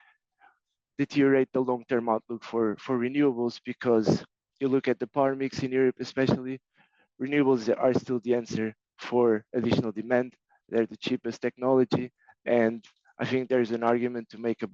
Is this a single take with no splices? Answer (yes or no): yes